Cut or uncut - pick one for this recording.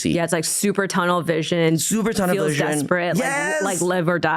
uncut